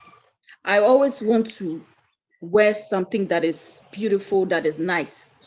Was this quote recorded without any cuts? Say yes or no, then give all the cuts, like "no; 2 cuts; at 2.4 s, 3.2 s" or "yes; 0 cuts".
yes; 0 cuts